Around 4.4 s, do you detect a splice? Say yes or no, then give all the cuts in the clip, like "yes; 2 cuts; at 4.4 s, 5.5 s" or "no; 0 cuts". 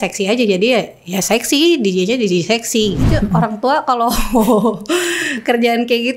no; 1 cut; at 3.1 s